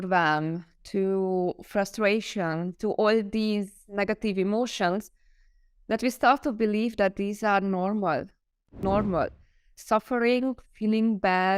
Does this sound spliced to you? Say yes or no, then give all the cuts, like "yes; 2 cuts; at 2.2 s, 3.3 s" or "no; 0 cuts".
yes; 1 cut; at 8.8 s